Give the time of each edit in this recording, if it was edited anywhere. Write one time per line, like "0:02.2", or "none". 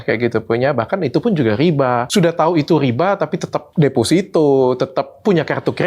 0:02.1
0:03.6